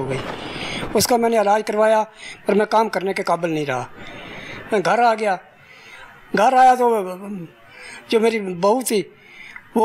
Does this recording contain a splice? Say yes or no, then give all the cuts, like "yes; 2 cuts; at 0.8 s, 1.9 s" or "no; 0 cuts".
no; 0 cuts